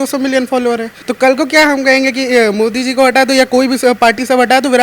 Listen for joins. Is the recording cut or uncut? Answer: cut